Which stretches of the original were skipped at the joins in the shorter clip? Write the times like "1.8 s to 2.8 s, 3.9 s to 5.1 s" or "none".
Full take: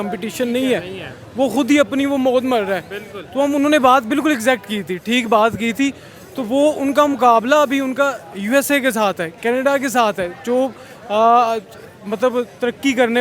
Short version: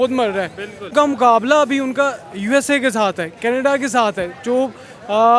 3.3 s to 6.9 s